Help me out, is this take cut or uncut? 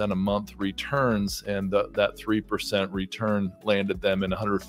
uncut